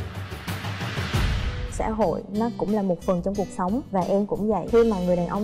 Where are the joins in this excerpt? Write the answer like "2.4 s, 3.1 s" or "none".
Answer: 1.7 s